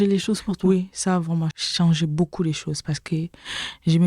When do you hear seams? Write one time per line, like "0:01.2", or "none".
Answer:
0:01.5